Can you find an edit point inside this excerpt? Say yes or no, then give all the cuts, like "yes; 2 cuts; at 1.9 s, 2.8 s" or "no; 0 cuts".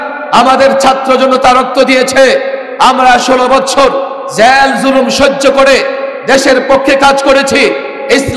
no; 0 cuts